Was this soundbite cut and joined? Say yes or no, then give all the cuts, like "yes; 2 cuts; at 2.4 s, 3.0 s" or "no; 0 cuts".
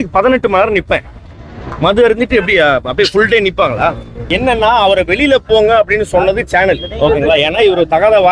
yes; 1 cut; at 4.2 s